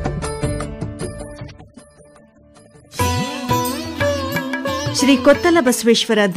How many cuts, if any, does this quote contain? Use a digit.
1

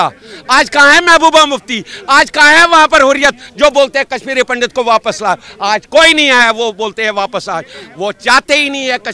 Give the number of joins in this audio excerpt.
0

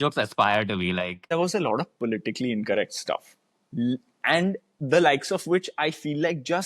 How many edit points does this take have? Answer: 1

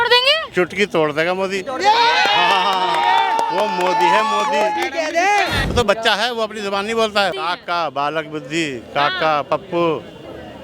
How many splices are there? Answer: 2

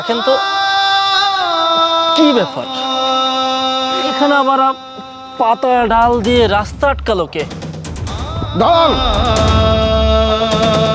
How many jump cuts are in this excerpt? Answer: 0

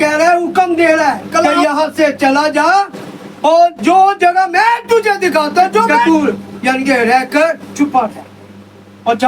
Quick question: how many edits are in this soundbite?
3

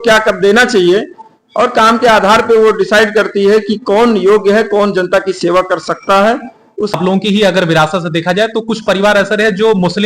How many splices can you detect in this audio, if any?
1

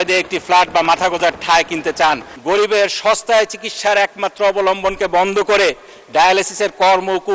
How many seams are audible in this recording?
1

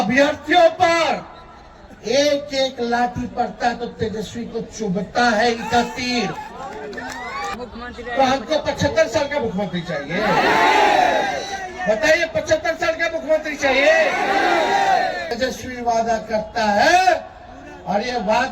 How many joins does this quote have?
2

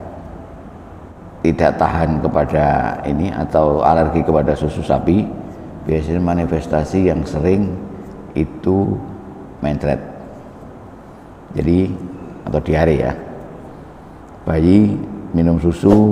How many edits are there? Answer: 1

